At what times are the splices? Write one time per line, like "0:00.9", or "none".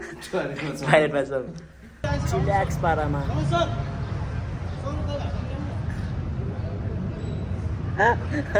0:02.0